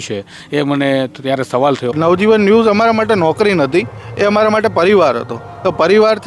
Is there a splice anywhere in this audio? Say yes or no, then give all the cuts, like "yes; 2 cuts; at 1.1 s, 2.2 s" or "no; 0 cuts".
yes; 1 cut; at 1.9 s